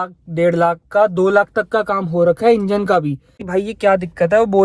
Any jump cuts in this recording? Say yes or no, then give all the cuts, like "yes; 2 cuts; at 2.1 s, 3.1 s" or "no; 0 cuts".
yes; 1 cut; at 3.4 s